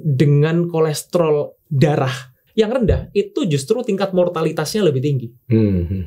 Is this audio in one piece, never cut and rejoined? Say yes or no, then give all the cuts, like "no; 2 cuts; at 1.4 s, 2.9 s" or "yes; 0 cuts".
no; 1 cut; at 2.3 s